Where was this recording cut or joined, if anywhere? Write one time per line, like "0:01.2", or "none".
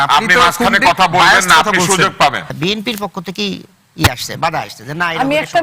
0:02.5